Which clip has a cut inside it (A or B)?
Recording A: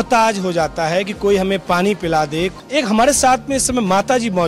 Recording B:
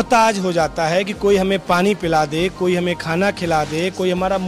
A